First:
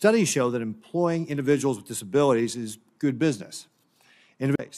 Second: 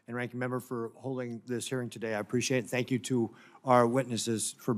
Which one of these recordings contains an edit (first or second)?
second